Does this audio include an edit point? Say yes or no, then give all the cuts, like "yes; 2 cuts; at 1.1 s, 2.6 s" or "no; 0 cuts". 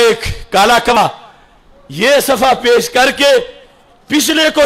yes; 1 cut; at 0.9 s